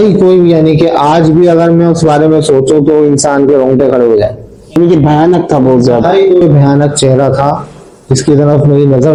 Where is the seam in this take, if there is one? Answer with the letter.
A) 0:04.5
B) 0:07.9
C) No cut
C